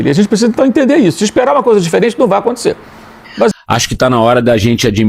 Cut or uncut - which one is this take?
cut